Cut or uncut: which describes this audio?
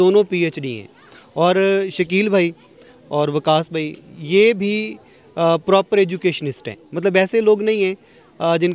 uncut